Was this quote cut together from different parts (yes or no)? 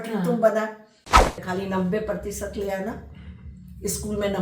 yes